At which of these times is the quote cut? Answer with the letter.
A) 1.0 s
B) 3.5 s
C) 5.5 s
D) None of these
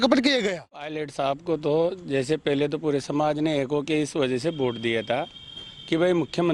A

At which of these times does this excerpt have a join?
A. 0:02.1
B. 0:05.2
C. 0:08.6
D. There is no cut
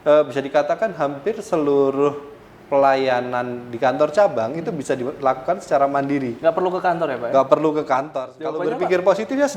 C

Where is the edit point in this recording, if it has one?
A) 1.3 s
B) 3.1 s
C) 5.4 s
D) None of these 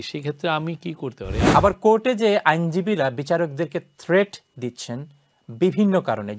A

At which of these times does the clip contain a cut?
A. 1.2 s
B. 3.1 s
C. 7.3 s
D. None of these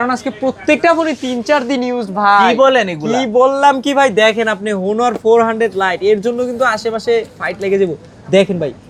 D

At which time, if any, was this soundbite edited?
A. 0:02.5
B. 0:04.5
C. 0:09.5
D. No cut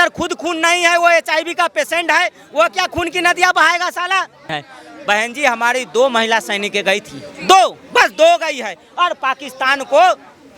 B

